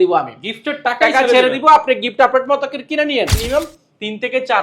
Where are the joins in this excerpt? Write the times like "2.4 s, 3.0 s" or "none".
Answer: 3.4 s